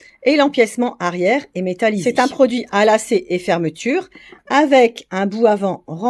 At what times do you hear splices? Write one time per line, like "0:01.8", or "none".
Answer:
0:02.0

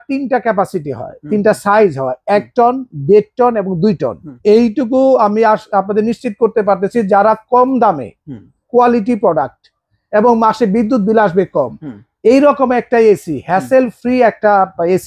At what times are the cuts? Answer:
0:04.3

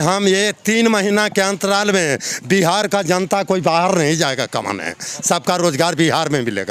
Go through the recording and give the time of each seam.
none

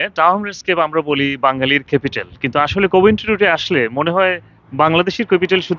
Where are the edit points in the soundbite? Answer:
none

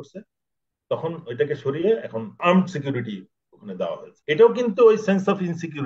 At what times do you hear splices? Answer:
0:02.3
0:04.1

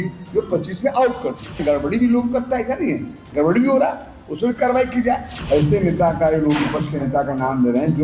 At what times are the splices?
0:01.6
0:05.3

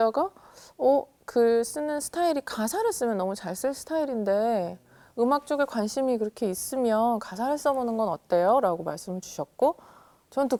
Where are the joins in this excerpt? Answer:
none

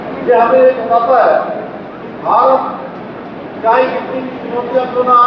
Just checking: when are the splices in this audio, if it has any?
none

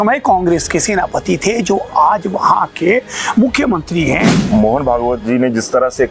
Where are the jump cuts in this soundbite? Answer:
0:04.4

